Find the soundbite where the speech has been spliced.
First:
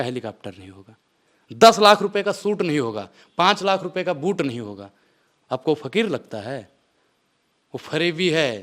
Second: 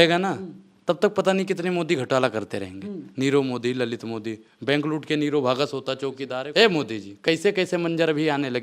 second; 1 cut; at 6.4 s

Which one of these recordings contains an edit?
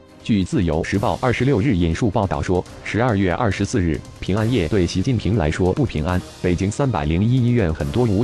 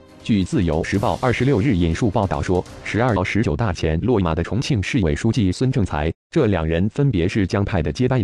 first; 1 cut; at 3.2 s

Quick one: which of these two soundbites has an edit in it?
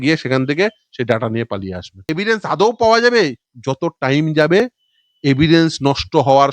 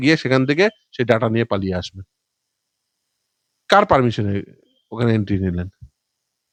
first; 1 cut; at 2.1 s

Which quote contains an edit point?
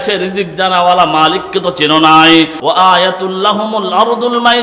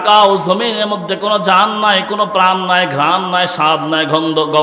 first; 1 cut; at 2.6 s

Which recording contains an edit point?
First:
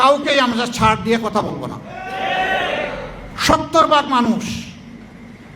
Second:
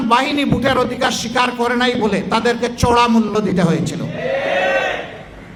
first; 1 cut; at 3.3 s

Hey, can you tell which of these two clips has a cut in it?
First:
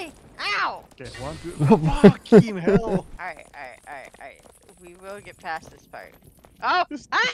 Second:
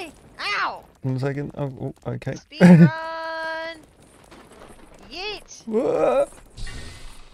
first; 2 cuts; at 0.9 s, 3.1 s

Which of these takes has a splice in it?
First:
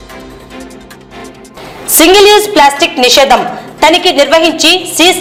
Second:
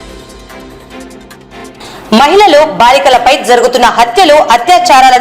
second; 1 cut; at 1.0 s

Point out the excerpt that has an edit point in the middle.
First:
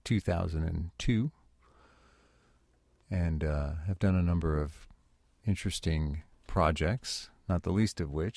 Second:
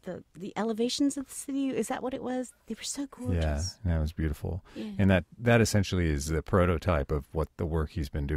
first; 1 cut; at 2.4 s

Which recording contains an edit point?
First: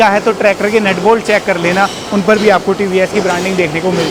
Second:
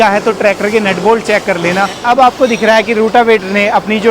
second; 1 cut; at 2.0 s

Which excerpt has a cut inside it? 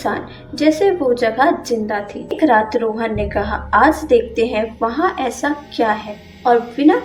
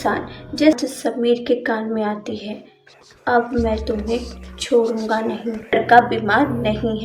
second; 2 cuts; at 0.8 s, 5.7 s

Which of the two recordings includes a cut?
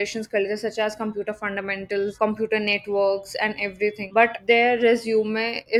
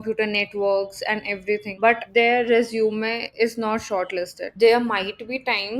second; 1 cut; at 4.4 s

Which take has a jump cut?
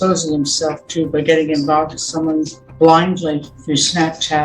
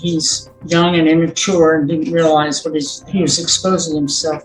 first; 2 cuts; at 2.6 s, 3.5 s

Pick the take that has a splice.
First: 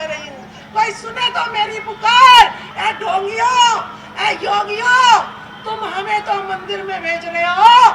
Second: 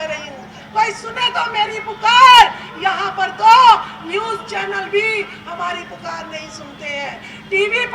first; 1 cut; at 2.7 s

